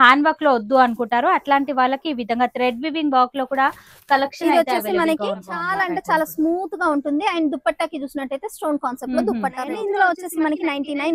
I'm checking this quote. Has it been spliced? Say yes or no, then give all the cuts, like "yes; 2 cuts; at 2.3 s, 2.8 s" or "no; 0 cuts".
yes; 2 cuts; at 5.6 s, 9.6 s